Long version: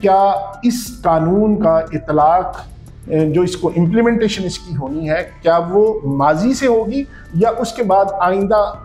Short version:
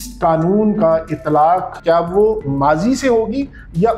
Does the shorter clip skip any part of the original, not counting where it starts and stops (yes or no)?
yes